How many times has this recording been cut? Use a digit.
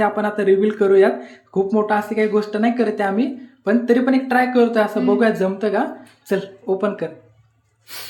0